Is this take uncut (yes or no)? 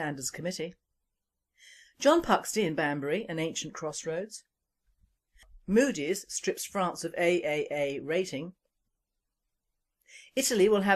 no